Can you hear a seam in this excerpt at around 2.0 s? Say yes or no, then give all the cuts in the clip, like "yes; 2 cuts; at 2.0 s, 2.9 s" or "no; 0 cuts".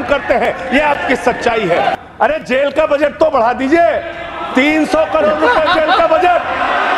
yes; 1 cut; at 2.0 s